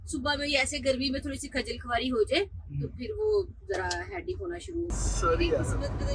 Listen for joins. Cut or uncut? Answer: cut